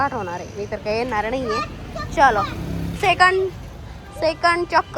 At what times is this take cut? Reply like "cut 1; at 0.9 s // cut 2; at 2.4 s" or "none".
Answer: none